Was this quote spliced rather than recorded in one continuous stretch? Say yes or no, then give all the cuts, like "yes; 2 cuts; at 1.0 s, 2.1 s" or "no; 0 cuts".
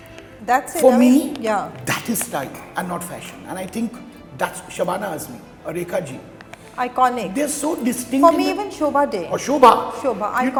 no; 0 cuts